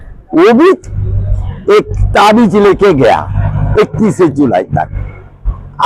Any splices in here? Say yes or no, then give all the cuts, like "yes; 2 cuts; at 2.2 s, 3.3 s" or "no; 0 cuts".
no; 0 cuts